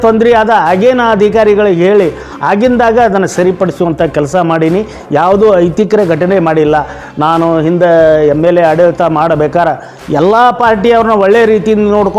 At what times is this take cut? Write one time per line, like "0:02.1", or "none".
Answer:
0:07.0